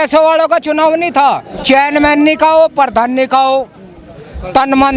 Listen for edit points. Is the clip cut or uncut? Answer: cut